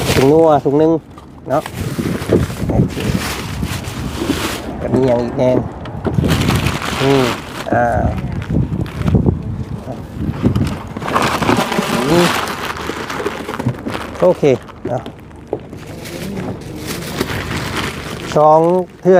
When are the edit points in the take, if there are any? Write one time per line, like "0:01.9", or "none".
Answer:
none

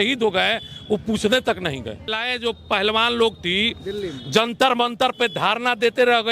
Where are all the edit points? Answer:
0:02.2

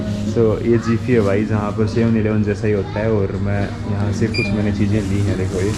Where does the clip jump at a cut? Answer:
none

